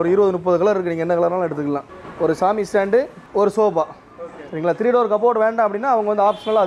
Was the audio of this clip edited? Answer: yes; 2 cuts; at 1.9 s, 3.2 s

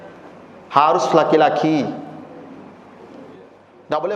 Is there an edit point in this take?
no; 0 cuts

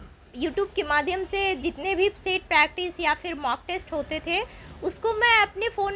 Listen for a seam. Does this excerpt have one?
no; 0 cuts

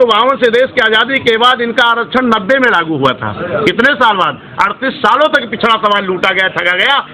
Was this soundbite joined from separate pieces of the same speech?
no; 0 cuts

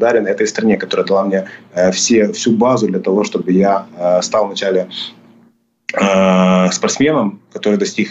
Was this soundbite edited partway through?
no; 0 cuts

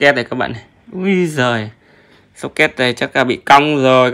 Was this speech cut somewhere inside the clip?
no; 0 cuts

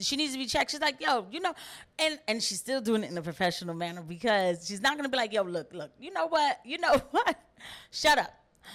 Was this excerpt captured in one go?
yes; 0 cuts

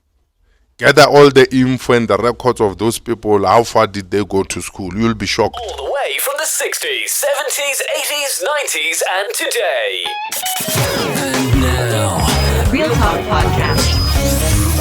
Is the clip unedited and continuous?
no; 1 cut; at 5.6 s

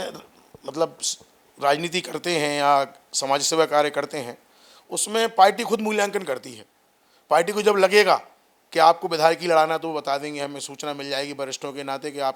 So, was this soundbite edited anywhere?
no; 0 cuts

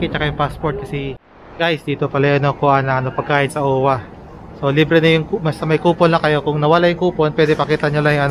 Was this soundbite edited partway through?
yes; 1 cut; at 1.2 s

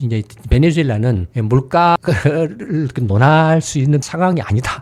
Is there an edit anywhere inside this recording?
no; 0 cuts

